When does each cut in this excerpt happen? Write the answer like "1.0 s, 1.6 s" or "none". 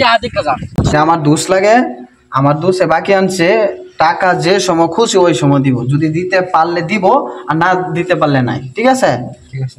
0.9 s